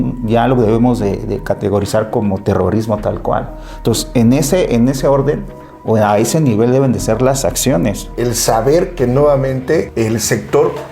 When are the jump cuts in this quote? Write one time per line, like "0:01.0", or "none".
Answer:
0:08.1
0:09.9